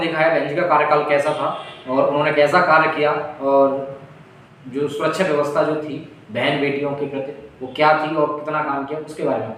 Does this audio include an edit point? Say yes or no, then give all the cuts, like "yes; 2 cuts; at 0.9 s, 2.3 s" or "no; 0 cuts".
no; 0 cuts